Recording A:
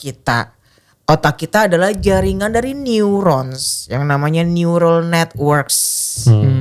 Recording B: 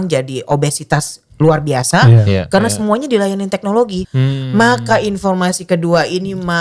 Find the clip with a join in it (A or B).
B